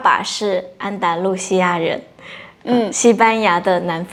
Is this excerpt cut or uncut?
uncut